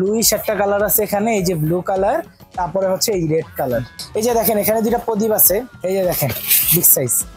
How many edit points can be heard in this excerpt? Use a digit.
2